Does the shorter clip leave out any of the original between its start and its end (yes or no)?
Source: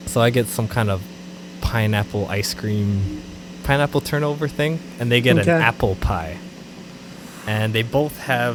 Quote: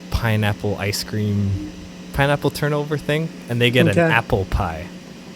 no